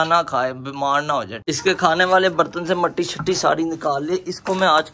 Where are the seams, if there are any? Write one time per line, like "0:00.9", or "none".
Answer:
0:01.4